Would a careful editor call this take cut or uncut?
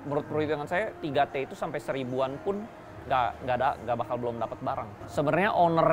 cut